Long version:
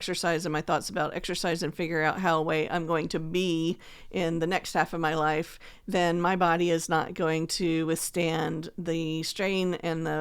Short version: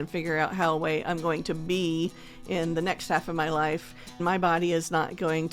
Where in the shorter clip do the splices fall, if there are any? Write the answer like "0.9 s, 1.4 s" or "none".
4.2 s